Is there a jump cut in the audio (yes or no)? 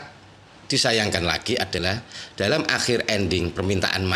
no